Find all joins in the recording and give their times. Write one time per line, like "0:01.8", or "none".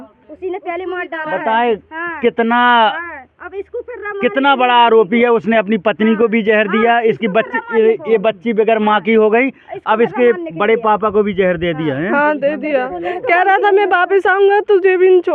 none